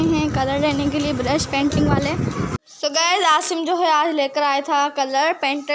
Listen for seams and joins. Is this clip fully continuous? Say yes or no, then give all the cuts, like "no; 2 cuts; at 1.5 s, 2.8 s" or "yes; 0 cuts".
no; 1 cut; at 2.7 s